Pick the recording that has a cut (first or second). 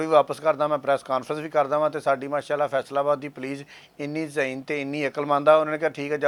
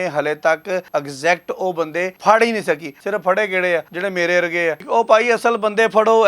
second